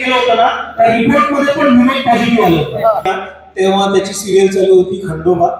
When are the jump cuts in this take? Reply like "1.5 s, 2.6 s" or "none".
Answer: 3.0 s